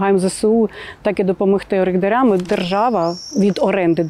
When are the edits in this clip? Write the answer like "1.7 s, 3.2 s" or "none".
2.5 s